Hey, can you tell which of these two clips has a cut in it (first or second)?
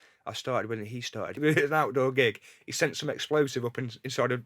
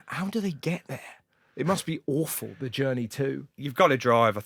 first